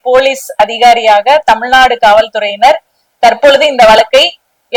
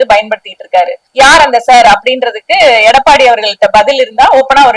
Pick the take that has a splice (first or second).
second